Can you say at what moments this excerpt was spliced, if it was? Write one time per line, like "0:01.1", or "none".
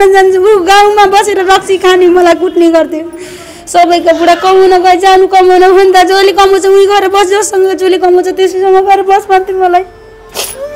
none